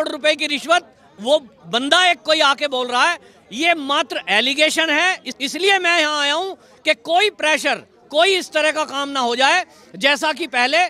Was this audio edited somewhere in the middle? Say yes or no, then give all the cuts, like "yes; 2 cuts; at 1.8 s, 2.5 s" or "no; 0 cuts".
yes; 1 cut; at 5.3 s